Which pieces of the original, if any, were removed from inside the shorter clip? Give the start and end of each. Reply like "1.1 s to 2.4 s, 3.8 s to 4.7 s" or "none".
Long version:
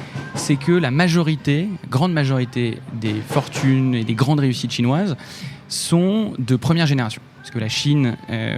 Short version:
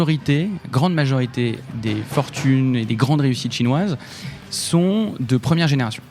none